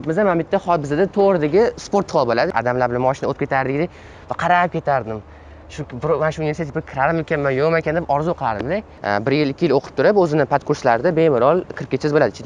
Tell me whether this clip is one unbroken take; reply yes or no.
no